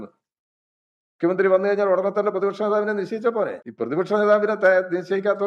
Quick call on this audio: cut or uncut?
cut